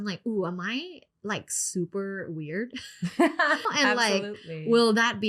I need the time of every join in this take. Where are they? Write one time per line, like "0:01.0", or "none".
0:03.6